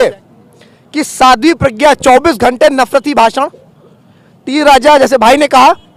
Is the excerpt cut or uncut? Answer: uncut